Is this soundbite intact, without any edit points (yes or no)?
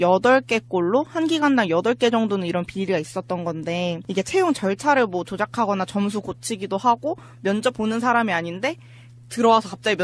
no